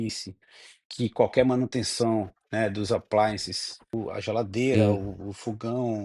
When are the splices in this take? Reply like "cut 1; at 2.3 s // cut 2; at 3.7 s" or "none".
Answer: cut 1; at 3.9 s